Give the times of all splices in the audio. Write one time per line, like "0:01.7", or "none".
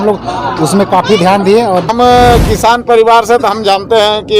0:01.9